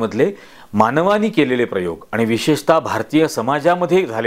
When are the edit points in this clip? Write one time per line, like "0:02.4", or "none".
none